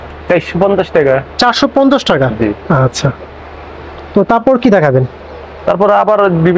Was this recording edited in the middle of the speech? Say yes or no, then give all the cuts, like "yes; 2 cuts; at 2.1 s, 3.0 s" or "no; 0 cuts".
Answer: no; 0 cuts